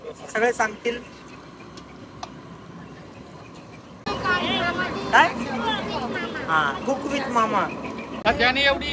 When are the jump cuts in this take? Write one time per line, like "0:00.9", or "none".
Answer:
0:04.0
0:08.2

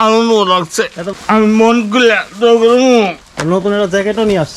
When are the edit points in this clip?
0:01.0
0:03.3

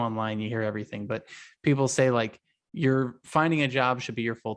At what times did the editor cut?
none

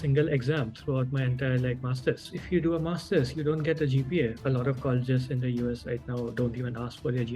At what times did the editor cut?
0:02.3
0:04.4

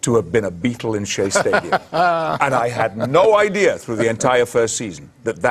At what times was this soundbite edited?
0:04.2

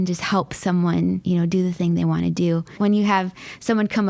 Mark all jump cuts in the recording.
0:01.2
0:02.8

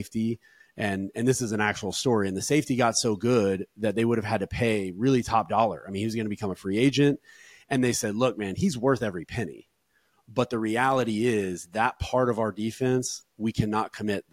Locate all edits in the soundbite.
none

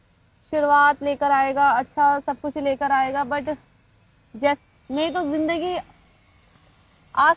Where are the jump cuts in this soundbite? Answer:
0:04.6

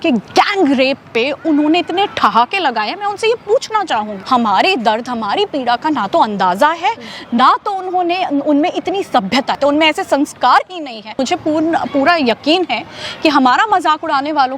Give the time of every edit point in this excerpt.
0:04.2
0:09.6
0:11.2

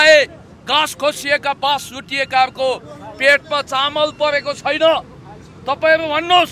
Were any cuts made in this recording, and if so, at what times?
none

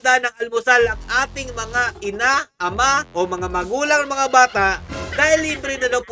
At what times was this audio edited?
none

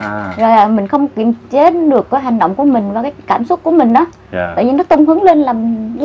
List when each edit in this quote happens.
none

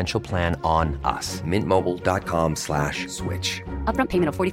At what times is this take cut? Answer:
none

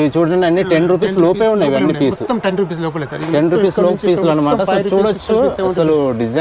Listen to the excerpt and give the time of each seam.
none

